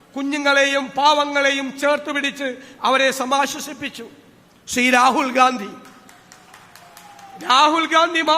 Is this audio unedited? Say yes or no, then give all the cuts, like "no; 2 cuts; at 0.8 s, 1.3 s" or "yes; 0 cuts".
yes; 0 cuts